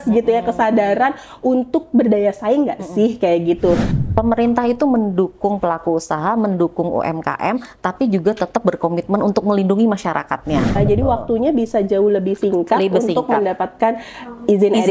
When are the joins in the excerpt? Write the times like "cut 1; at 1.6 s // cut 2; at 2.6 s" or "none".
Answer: cut 1; at 3.9 s // cut 2; at 10.8 s